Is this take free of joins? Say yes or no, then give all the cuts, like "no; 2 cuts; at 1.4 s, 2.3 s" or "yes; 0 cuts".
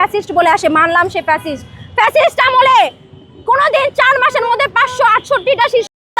yes; 0 cuts